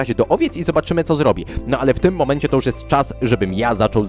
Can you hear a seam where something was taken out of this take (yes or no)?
yes